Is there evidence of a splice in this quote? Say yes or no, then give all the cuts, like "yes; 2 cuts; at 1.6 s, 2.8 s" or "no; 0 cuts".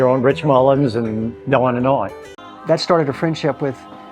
yes; 1 cut; at 2.2 s